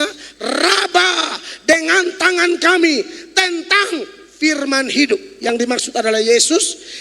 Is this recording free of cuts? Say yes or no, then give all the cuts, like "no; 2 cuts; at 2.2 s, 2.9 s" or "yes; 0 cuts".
yes; 0 cuts